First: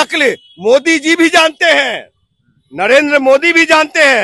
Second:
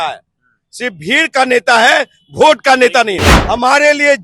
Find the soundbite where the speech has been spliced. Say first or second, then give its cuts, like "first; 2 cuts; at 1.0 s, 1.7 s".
second; 1 cut; at 3.3 s